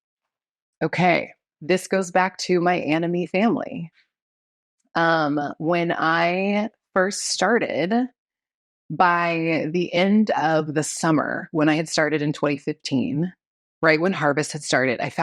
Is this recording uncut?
no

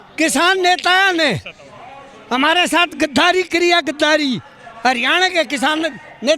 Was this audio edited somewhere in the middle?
no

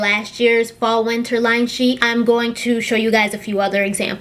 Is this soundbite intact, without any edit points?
yes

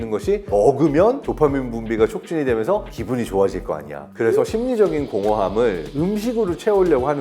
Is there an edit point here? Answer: yes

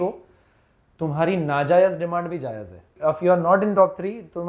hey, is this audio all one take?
no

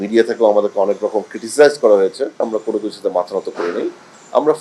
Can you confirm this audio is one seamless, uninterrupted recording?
no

